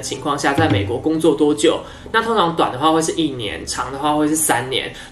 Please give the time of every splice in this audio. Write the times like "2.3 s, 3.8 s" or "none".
none